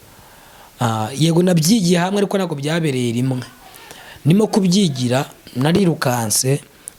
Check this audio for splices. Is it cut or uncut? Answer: uncut